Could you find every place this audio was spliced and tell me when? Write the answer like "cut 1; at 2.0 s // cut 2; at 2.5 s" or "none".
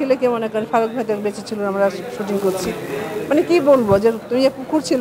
none